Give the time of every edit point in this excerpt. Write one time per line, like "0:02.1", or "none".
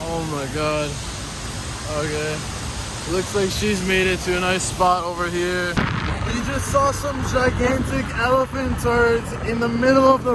0:05.8

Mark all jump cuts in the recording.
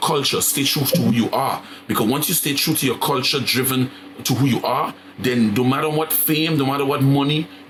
none

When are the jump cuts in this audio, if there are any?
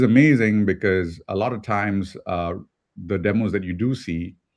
0:01.4

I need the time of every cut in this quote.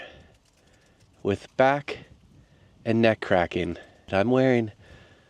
0:04.1

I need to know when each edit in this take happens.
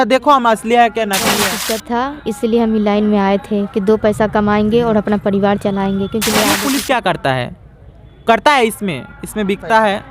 0:01.5
0:06.5

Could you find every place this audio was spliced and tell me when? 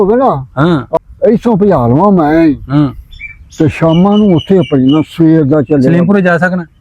0:01.0

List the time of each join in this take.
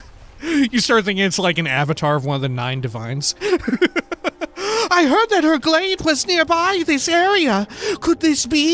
0:03.3

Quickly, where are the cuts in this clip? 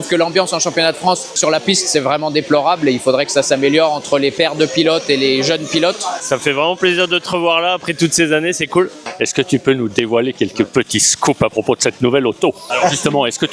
0:01.4
0:06.1
0:09.1
0:12.6

